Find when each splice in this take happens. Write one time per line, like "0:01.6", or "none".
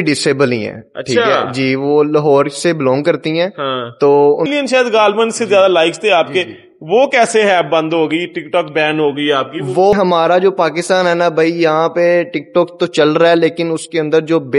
0:04.5
0:09.9